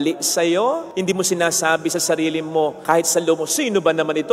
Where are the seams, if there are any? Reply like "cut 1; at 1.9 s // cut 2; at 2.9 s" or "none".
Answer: cut 1; at 2.8 s